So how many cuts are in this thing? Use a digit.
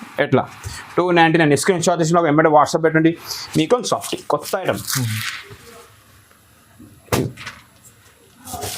1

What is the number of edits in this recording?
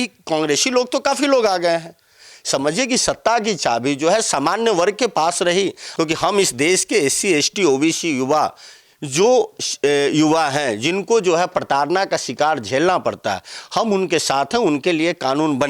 1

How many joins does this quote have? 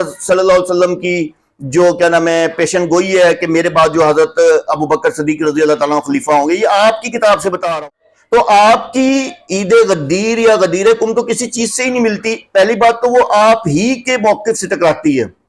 1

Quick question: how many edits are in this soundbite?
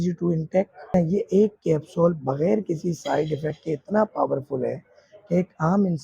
1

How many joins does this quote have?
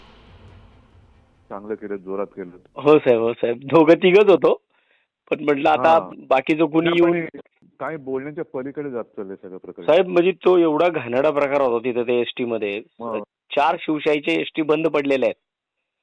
1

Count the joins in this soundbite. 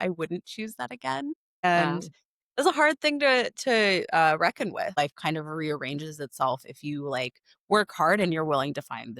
1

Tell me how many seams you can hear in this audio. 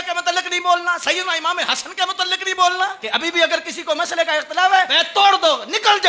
2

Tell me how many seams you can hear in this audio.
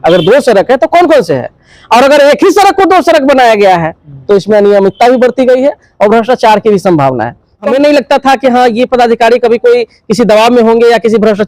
1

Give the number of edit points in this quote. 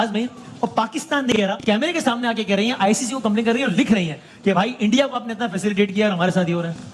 0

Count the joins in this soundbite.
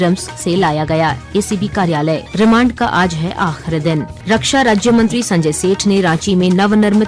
2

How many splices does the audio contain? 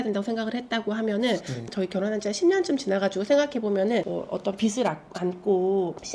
2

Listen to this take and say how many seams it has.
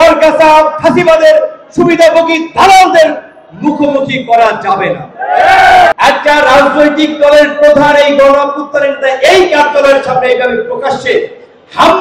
1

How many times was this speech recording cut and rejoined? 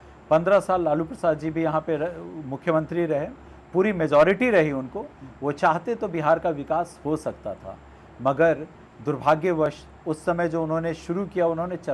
0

